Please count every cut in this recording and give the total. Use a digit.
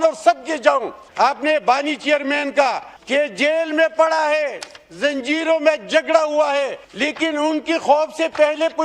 3